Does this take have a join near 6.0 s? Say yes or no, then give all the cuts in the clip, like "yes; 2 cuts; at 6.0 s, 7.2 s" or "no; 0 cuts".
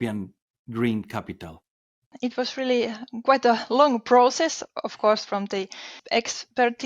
yes; 2 cuts; at 2.1 s, 6.0 s